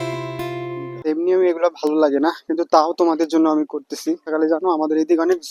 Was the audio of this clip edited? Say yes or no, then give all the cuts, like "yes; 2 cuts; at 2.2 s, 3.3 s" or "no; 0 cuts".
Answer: yes; 2 cuts; at 0.8 s, 4.3 s